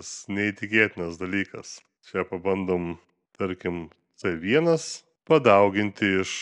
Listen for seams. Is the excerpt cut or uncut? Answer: uncut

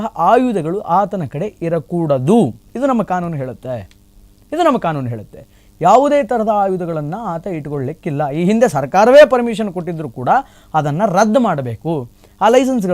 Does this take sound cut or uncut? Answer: uncut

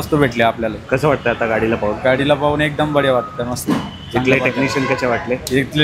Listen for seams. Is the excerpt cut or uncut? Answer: uncut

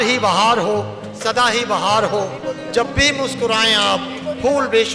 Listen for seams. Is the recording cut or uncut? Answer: uncut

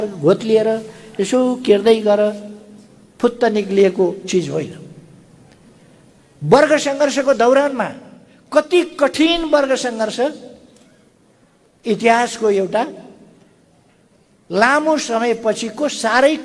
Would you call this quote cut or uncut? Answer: uncut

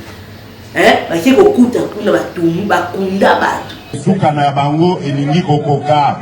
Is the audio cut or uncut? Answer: cut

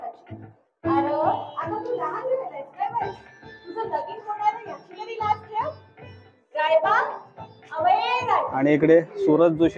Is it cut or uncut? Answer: cut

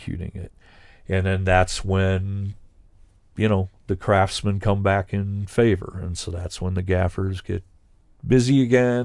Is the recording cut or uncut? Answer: uncut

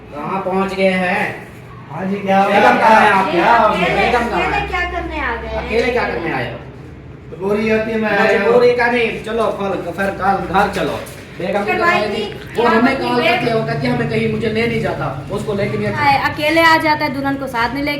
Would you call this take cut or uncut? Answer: cut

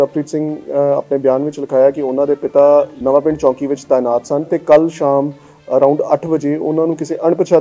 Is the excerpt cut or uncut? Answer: cut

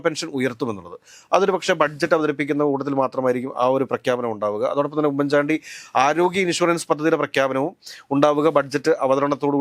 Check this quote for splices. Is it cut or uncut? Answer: uncut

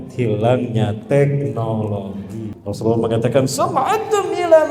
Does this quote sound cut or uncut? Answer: cut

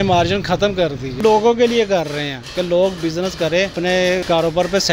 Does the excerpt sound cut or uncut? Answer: cut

